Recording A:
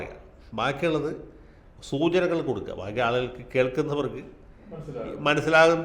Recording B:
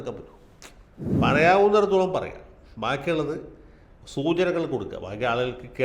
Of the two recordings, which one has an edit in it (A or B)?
B